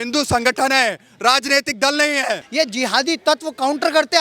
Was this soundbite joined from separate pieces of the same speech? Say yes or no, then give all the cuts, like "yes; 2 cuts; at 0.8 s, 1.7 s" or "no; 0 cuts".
yes; 1 cut; at 2.4 s